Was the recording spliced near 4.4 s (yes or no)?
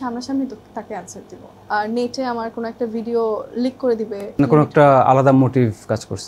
yes